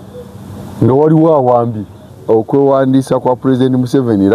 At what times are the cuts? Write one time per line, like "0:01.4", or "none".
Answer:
0:02.1